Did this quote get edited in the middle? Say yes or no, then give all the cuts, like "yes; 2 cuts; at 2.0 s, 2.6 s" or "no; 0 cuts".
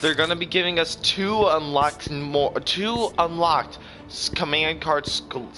yes; 1 cut; at 2.7 s